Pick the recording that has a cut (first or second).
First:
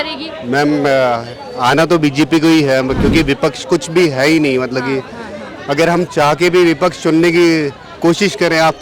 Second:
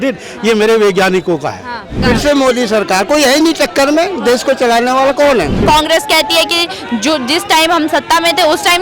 second